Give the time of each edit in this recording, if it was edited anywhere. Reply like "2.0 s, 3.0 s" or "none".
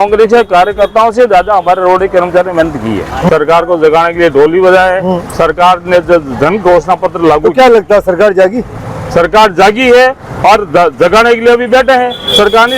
3.3 s

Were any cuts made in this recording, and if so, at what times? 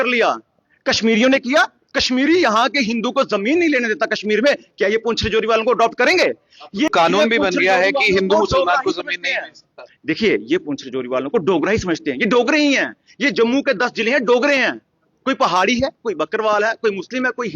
6.9 s

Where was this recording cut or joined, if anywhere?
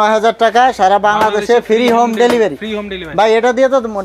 none

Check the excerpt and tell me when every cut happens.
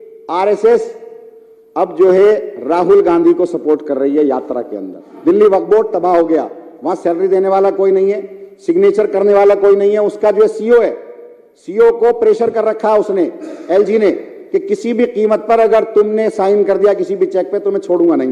5.0 s

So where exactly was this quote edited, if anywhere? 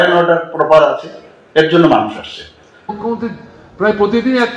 3.0 s

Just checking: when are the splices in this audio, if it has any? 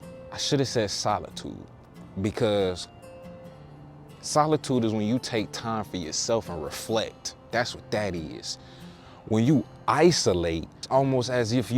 10.9 s

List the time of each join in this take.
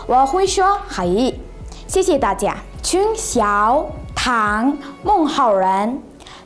2.7 s

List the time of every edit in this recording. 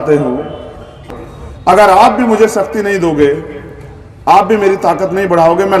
1.0 s

